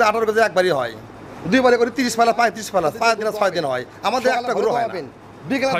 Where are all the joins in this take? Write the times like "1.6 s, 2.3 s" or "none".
4.7 s